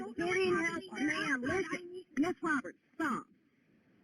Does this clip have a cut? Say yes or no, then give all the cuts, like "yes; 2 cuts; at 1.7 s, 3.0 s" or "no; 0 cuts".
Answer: yes; 1 cut; at 2.8 s